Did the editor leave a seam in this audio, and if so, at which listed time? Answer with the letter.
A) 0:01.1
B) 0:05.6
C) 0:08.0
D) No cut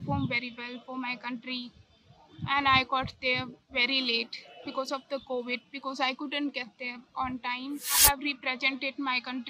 C